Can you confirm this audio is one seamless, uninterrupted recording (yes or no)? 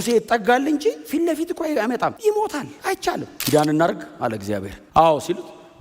no